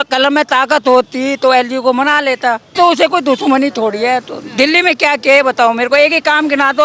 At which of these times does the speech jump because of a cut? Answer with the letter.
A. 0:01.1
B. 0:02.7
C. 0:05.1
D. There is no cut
B